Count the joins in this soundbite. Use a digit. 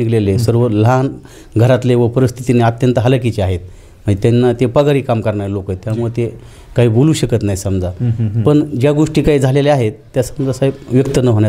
0